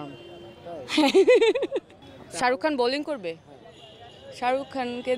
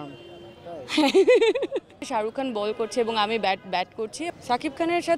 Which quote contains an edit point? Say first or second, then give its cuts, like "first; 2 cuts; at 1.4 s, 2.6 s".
second; 2 cuts; at 2.0 s, 4.2 s